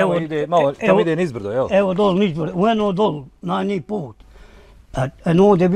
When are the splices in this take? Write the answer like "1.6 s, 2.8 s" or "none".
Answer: none